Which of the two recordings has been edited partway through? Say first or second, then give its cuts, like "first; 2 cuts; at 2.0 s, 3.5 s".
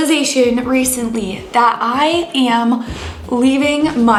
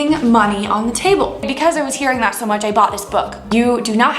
second; 2 cuts; at 1.4 s, 3.5 s